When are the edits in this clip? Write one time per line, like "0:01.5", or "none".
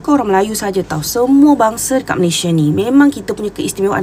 none